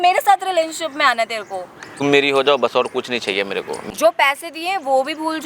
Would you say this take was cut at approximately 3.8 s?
yes; 2 cuts; at 2.0 s, 3.8 s

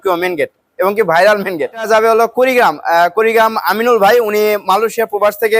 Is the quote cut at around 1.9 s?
yes; 1 cut; at 1.9 s

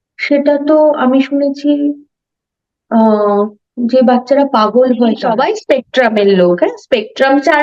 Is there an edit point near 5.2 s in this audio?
yes; 1 cut; at 5.2 s

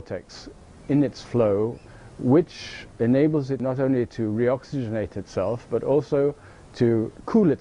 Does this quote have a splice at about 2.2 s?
yes; 1 cut; at 2.2 s

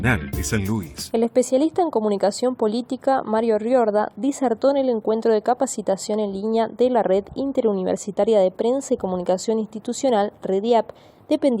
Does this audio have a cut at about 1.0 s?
yes; 1 cut; at 1.0 s

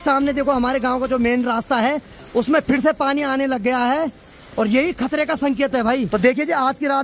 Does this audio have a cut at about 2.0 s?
no; 0 cuts

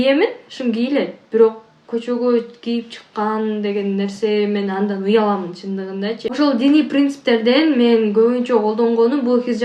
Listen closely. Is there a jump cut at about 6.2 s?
no; 0 cuts

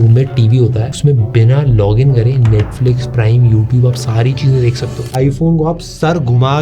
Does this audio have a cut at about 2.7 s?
no; 1 cut; at 5.1 s

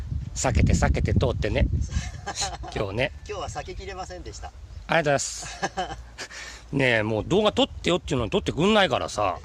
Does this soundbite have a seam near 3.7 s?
yes; 1 cut; at 3.7 s

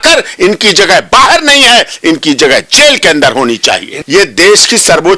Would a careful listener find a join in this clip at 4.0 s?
yes; 1 cut; at 4.0 s

